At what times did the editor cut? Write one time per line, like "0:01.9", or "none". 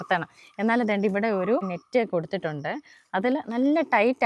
0:01.8